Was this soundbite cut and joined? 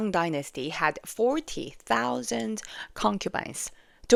no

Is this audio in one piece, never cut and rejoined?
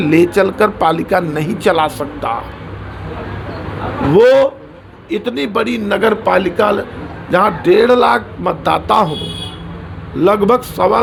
yes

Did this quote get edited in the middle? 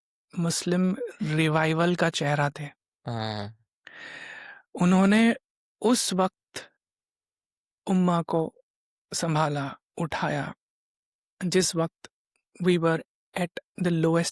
no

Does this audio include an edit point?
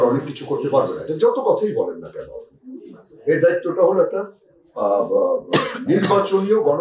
no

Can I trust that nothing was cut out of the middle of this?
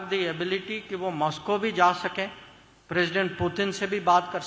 yes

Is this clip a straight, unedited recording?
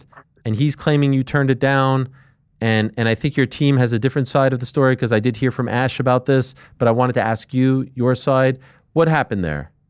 yes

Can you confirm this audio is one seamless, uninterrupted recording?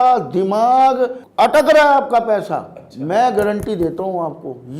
no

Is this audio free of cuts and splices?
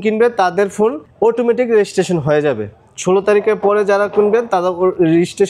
yes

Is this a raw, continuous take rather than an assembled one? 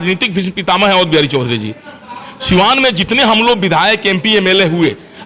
yes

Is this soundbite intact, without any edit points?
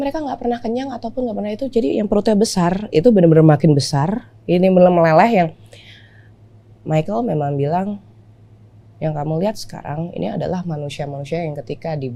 yes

